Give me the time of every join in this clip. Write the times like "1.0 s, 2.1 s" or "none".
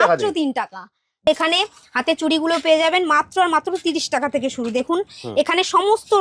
1.2 s